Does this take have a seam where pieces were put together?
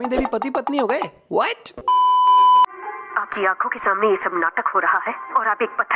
no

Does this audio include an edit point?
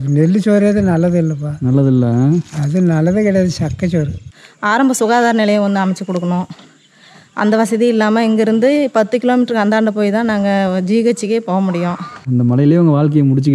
yes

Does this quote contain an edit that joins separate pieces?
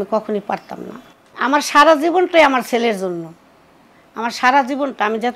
no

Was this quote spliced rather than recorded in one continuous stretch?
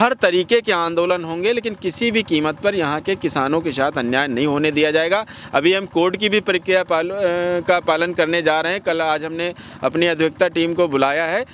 no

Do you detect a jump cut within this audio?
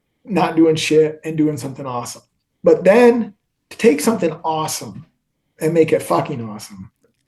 no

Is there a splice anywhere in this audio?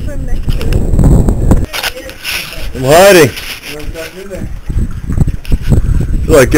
yes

